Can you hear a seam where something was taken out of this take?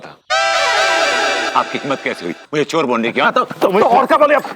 yes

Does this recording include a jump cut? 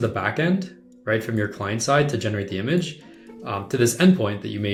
no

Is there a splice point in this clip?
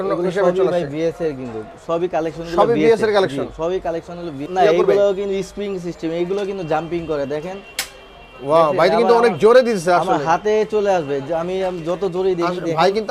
yes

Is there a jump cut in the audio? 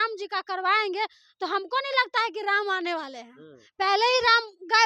no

